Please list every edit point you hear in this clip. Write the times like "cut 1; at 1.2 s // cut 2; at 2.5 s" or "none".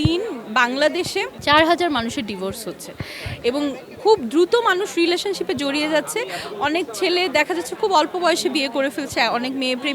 cut 1; at 1.3 s